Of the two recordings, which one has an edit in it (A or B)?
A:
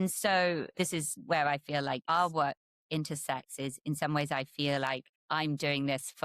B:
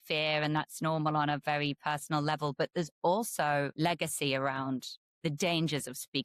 A